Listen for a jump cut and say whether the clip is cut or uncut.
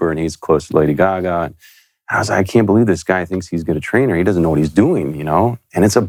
uncut